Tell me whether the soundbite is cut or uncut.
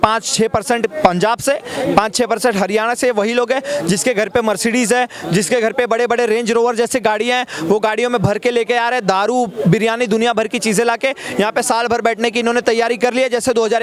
uncut